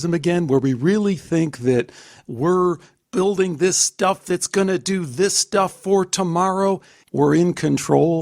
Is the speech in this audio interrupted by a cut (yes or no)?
yes